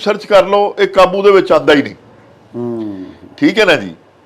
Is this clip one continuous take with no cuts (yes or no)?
yes